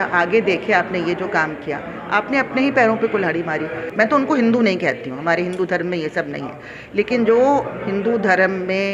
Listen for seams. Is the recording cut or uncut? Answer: cut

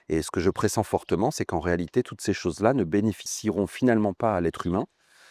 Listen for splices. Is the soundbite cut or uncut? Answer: cut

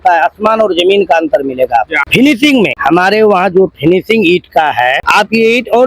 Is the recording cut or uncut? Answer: cut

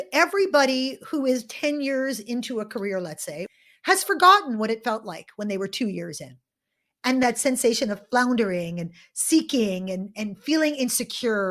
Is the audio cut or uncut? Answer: cut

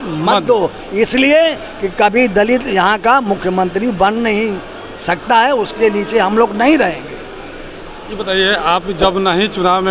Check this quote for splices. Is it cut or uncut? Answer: uncut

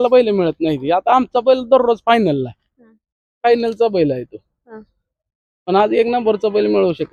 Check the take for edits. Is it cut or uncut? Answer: uncut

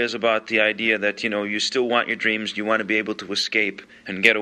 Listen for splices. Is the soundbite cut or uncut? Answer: uncut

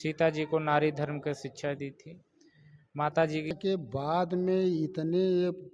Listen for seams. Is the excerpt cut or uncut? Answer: cut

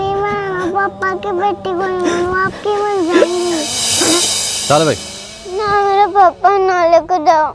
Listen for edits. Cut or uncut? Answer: cut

